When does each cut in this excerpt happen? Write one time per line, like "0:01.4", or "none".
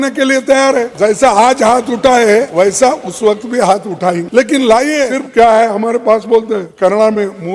0:00.9
0:02.5
0:04.3
0:05.2
0:06.7